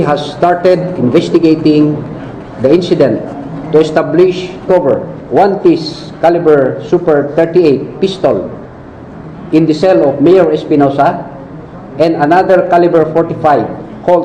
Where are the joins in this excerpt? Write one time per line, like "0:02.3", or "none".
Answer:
none